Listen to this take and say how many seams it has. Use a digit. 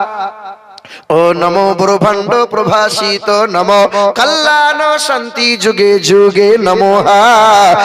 0